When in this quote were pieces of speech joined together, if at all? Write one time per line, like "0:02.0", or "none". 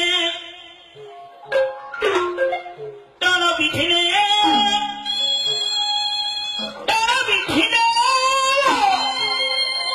0:01.7